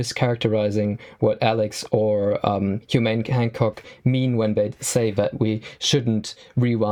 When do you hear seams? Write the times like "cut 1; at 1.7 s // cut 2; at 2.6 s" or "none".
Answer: none